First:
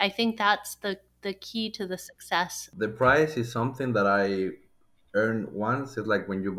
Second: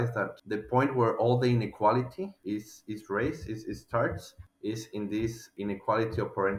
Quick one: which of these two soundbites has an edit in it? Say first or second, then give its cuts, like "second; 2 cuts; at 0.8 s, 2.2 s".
first; 1 cut; at 2.6 s